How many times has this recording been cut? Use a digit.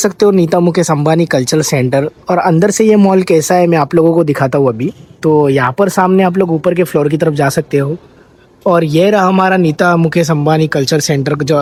0